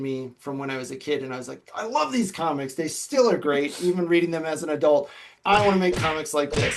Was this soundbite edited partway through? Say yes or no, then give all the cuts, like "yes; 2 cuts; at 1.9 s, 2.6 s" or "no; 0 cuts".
yes; 1 cut; at 5.3 s